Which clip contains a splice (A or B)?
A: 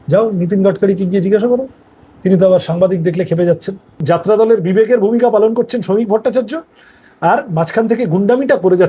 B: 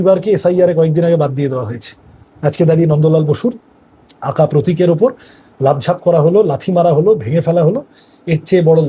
A